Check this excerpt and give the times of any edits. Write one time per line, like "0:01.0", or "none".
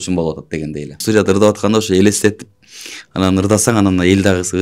0:01.0